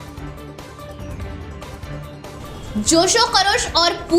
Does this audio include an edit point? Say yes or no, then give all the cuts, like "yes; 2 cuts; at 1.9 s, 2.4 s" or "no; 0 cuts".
no; 0 cuts